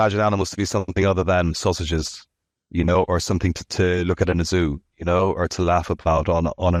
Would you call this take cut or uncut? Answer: uncut